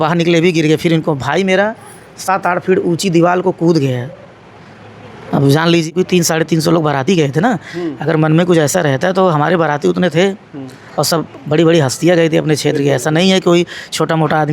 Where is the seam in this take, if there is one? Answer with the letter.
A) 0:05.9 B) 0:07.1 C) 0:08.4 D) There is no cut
A